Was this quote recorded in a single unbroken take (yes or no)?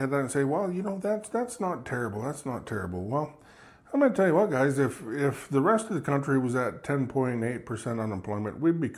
yes